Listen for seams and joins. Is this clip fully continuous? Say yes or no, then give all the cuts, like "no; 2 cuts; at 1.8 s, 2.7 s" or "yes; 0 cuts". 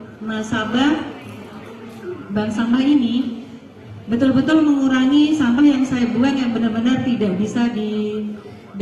yes; 0 cuts